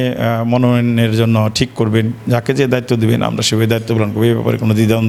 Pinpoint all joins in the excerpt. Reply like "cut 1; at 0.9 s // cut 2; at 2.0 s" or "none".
none